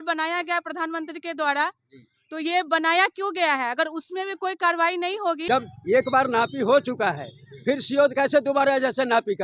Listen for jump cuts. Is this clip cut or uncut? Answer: cut